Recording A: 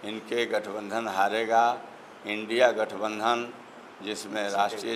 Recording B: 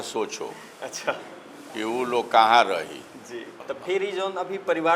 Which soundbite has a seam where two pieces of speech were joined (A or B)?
B